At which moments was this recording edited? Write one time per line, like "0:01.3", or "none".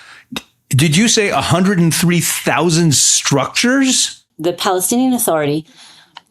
0:04.3